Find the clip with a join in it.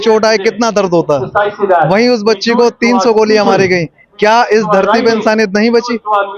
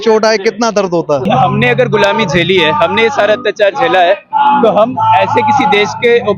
second; 1 cut; at 1.2 s

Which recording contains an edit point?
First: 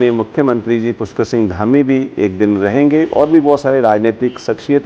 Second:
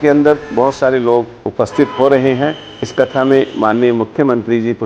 second; 2 cuts; at 1.4 s, 2.9 s

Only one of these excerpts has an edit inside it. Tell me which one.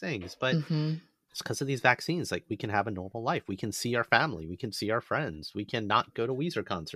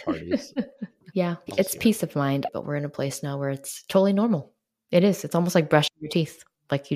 second; 2 cuts; at 1.4 s, 2.5 s

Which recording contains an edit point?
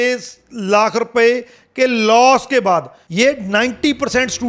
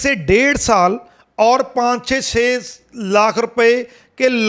first; 1 cut; at 3.0 s

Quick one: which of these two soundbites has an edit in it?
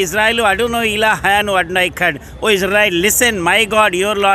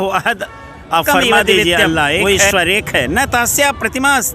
second; 1 cut; at 2.2 s

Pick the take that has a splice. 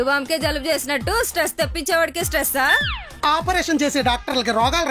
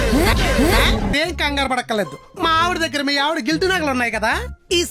second; 1 cut; at 1.1 s

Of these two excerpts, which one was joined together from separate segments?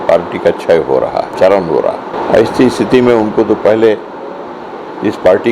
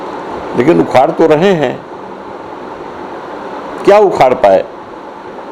first; 2 cuts; at 1.3 s, 2.1 s

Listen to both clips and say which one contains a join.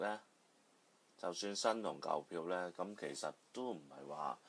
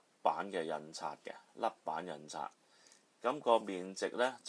first; 1 cut; at 3.1 s

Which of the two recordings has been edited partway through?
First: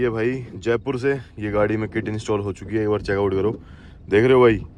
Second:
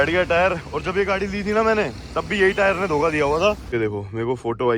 second; 1 cut; at 3.6 s

